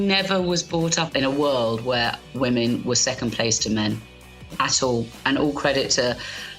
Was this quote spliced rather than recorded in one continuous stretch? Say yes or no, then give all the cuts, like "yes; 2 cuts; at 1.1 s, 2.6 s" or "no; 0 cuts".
yes; 1 cut; at 1.1 s